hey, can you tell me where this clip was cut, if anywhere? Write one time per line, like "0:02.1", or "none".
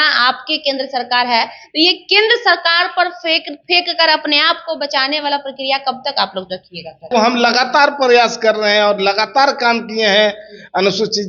0:07.1